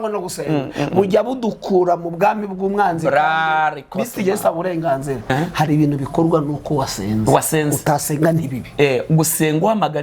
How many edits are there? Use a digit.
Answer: 1